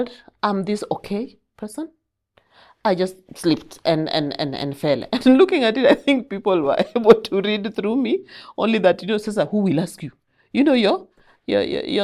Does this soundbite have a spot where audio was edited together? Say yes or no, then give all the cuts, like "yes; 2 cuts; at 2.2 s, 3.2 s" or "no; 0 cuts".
no; 0 cuts